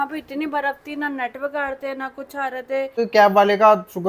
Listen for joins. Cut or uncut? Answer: cut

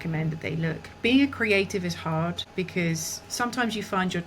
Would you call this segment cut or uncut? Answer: cut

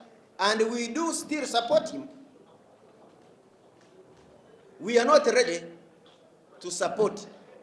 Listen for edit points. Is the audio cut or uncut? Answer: uncut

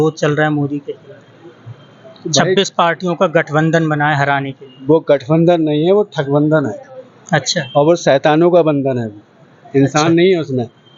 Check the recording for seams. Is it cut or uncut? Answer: uncut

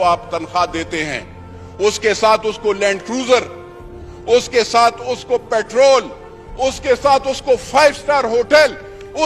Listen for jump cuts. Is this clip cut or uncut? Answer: uncut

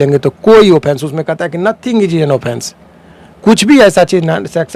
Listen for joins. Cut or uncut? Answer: uncut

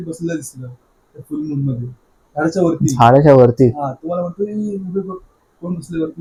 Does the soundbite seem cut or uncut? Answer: uncut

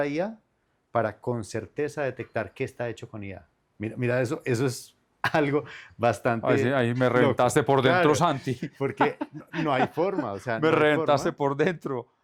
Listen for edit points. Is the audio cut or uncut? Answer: uncut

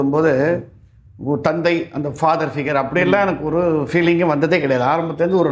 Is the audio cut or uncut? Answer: uncut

